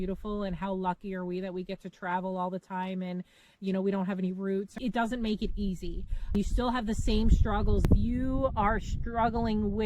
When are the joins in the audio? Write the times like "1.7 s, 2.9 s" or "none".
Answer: 4.7 s, 6.3 s, 7.9 s